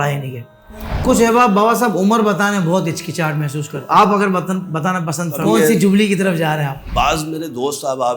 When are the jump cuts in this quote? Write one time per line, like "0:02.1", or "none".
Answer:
0:01.0
0:03.7
0:05.4
0:06.8